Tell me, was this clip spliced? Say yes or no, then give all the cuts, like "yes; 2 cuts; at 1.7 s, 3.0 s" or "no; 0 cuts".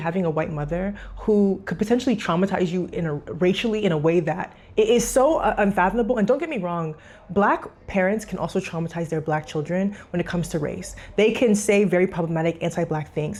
no; 0 cuts